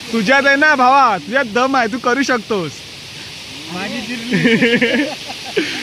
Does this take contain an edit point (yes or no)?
no